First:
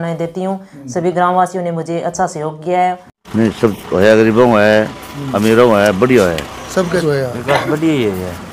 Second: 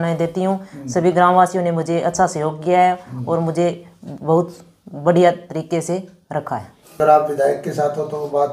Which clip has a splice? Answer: first; 2 cuts; at 3.2 s, 7.0 s

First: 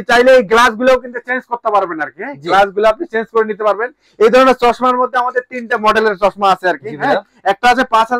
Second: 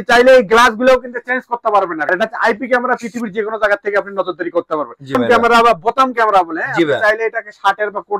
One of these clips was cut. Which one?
second; 2 cuts; at 2.1 s, 5.2 s

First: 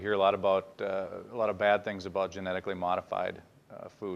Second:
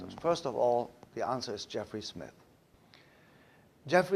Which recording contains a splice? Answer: second; 1 cut; at 1.4 s

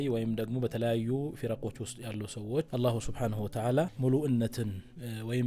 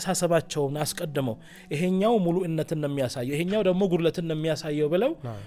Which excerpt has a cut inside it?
first; 2 cuts; at 2.7 s, 3.9 s

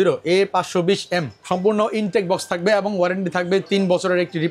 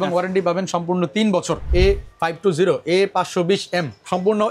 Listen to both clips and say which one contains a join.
second; 1 cut; at 1.6 s

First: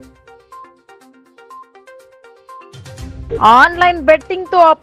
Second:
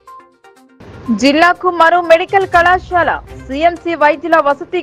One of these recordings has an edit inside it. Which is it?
first; 3 cuts; at 1.1 s, 1.9 s, 3.2 s

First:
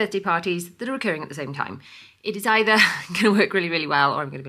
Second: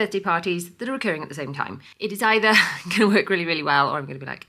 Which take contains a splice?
second; 1 cut; at 1.8 s

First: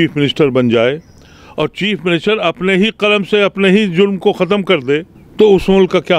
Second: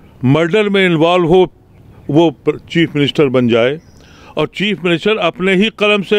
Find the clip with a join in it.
first; 1 cut; at 5.2 s

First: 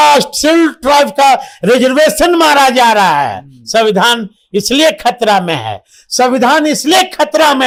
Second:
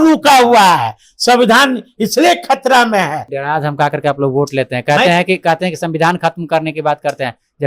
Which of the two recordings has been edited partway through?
second; 1 cut; at 3.3 s

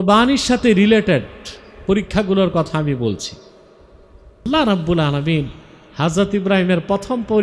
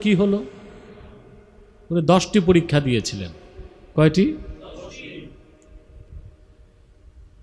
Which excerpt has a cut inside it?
first; 1 cut; at 4.5 s

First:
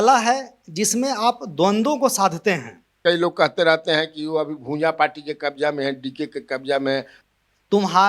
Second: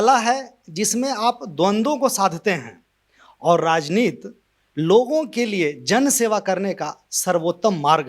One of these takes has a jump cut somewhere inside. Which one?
first; 2 cuts; at 2.9 s, 7.1 s

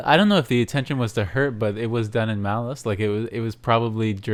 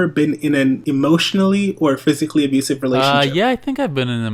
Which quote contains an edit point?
second; 2 cuts; at 0.8 s, 3.0 s

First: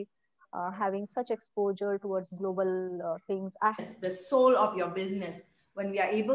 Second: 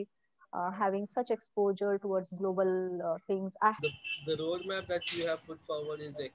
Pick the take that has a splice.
second; 1 cut; at 3.8 s

